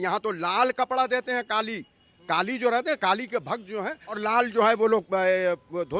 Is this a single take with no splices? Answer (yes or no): no